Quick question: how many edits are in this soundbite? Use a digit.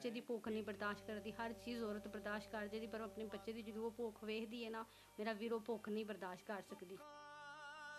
1